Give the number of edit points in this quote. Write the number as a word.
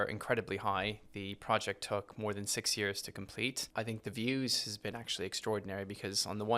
one